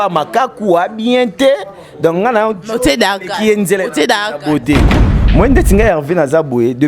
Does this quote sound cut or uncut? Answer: cut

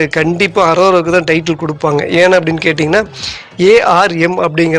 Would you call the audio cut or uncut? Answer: uncut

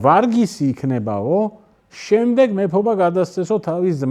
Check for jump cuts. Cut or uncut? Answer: uncut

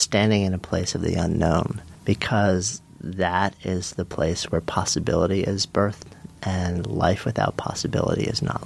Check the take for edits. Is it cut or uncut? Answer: cut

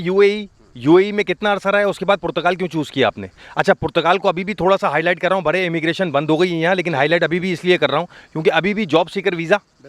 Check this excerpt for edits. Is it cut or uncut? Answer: uncut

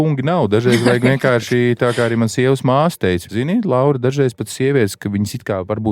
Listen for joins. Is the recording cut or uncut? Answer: cut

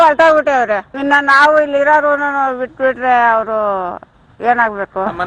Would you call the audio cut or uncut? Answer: uncut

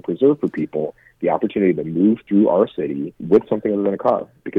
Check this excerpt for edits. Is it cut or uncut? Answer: cut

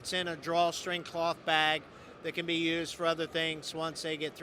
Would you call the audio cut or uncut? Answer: uncut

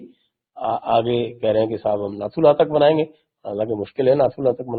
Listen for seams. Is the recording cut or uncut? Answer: uncut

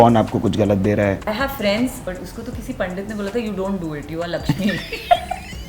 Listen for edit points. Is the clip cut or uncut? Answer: cut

